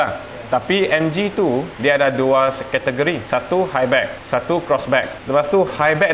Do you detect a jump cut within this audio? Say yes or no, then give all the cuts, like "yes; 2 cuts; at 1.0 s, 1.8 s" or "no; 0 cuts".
yes; 4 cuts; at 1.7 s, 3.2 s, 4.2 s, 5.2 s